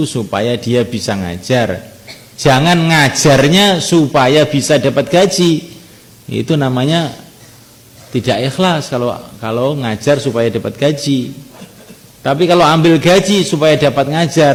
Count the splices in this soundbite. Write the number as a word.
zero